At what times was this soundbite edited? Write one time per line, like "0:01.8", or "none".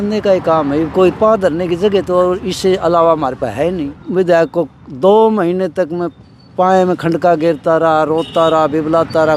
0:04.0